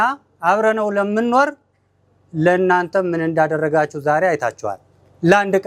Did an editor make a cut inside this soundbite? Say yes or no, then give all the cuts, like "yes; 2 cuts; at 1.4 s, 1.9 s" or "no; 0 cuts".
no; 0 cuts